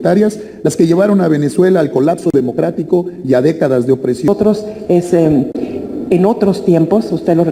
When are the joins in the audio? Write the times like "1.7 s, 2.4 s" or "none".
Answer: 4.3 s